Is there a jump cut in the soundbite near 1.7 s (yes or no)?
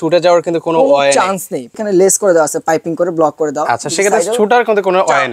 yes